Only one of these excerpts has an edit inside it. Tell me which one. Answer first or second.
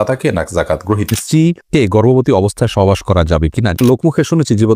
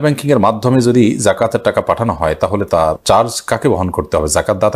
first